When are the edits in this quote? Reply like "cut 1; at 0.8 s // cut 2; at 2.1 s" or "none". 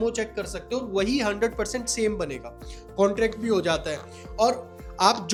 none